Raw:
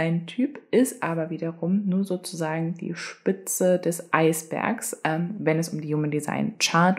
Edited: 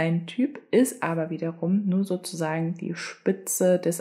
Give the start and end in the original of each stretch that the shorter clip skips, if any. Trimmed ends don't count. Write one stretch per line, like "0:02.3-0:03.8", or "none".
none